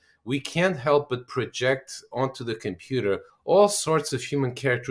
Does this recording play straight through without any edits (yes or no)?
no